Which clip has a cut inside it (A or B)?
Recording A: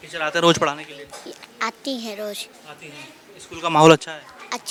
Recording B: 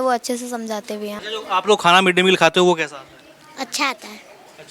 B